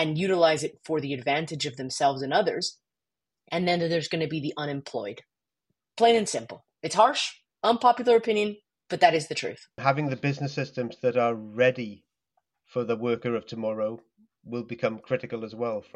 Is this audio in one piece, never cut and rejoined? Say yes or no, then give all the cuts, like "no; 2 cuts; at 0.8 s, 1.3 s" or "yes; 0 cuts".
no; 1 cut; at 9.7 s